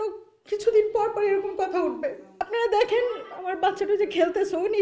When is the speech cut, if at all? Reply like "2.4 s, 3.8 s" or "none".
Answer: 2.3 s